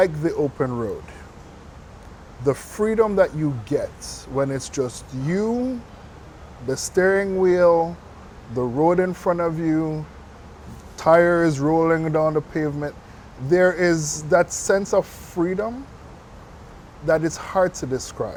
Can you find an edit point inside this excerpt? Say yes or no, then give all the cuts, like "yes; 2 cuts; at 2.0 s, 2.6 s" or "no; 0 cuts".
no; 0 cuts